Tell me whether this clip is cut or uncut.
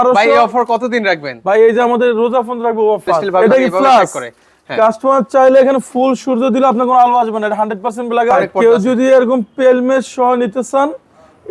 cut